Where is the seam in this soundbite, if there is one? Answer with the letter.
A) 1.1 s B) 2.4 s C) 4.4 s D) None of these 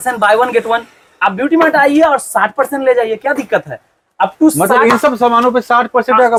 D